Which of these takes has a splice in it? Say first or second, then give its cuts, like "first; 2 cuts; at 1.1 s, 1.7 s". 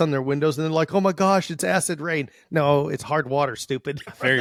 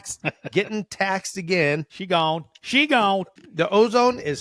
second; 2 cuts; at 1.9 s, 3.4 s